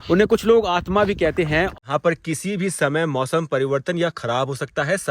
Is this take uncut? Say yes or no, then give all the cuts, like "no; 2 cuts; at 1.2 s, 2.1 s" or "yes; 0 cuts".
no; 1 cut; at 1.7 s